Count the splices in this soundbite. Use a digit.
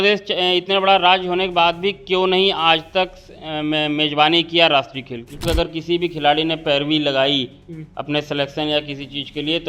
1